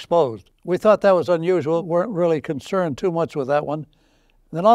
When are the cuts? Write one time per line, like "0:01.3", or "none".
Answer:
0:01.8